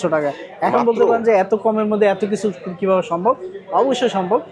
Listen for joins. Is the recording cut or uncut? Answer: uncut